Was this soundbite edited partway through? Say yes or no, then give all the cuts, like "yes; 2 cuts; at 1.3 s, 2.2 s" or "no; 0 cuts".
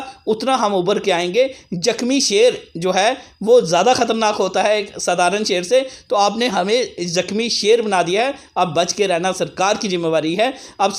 no; 0 cuts